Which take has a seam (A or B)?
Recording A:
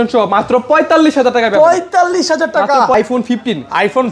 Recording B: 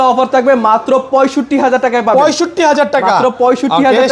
A